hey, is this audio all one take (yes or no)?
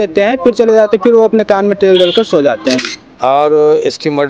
no